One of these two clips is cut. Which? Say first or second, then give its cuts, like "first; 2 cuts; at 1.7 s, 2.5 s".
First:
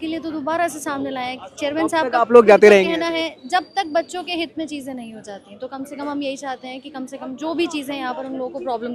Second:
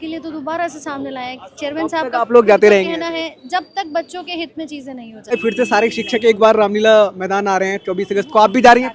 second; 1 cut; at 5.3 s